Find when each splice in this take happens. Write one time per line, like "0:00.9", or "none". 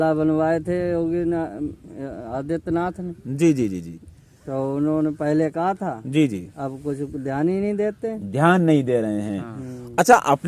none